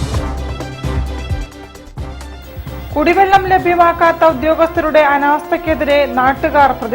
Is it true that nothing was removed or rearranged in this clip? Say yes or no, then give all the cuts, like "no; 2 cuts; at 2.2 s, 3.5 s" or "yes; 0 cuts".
no; 1 cut; at 2.3 s